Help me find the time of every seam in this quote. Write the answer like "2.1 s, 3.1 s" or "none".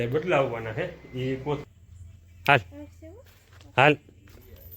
1.6 s